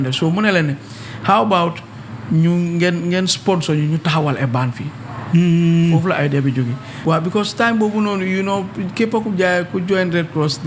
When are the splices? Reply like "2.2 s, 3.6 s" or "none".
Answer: 6.9 s

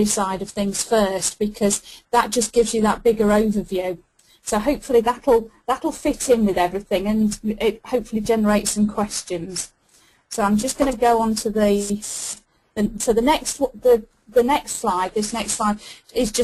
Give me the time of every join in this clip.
8.0 s

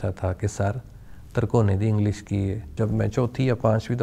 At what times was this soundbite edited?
2.7 s

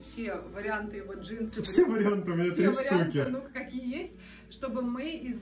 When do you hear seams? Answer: none

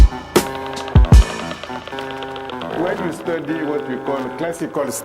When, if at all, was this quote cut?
1.3 s

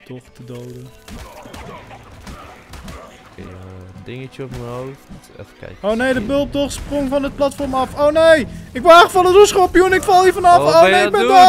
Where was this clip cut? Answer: none

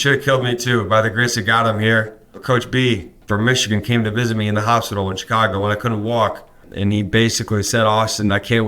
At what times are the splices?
2.2 s, 3.2 s, 6.7 s

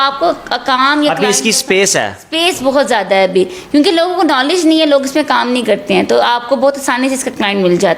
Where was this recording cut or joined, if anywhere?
none

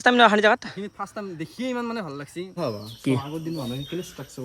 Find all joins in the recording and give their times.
2.6 s

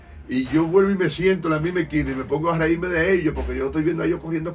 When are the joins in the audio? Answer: none

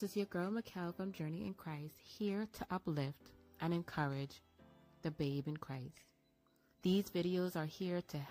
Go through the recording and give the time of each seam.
none

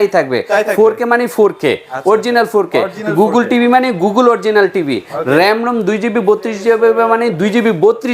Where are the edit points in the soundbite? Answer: none

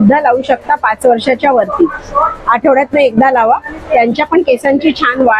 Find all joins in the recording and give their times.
none

